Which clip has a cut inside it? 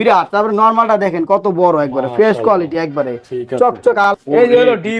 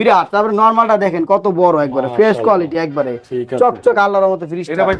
first; 1 cut; at 4.1 s

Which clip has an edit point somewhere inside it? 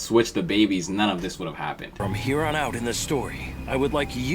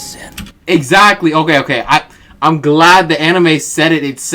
first; 1 cut; at 1.9 s

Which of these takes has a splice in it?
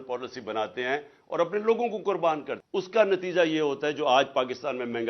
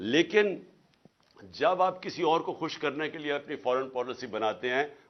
first; 1 cut; at 2.6 s

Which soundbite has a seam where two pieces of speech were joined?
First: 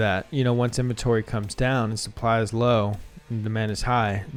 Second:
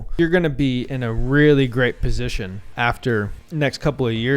second; 2 cuts; at 2.7 s, 3.4 s

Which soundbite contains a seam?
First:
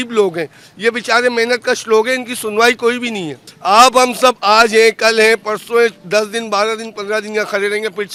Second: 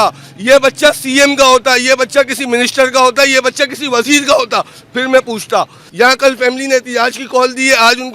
second; 1 cut; at 5.8 s

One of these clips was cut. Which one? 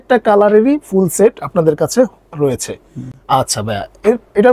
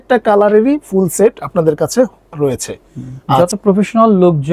second; 1 cut; at 3.1 s

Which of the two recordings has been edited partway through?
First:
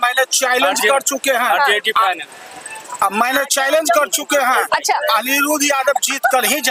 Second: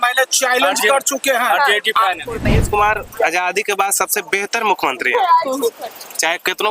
second; 1 cut; at 2.5 s

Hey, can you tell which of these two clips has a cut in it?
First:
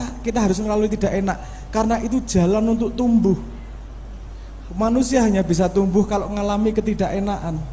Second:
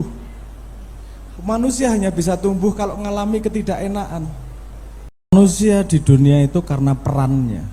second; 1 cut; at 5.3 s

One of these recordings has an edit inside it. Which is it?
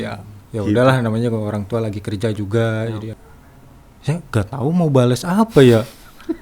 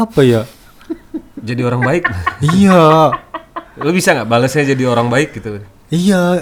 first; 1 cut; at 3.1 s

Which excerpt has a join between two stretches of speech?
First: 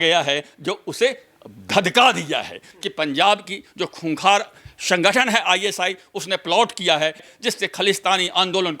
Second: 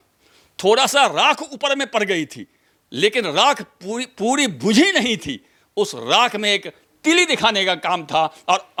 first; 2 cuts; at 2.7 s, 7.3 s

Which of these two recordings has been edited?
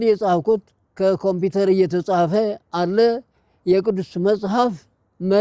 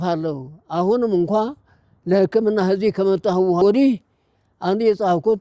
second; 1 cut; at 3.6 s

